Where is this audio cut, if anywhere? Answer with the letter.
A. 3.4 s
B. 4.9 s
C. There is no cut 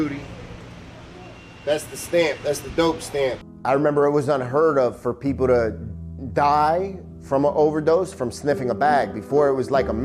A